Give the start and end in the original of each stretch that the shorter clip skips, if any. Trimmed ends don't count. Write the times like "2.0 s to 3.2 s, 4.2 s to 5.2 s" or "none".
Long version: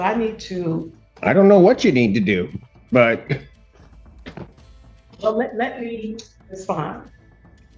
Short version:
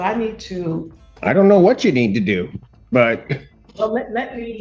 3.6 s to 5.0 s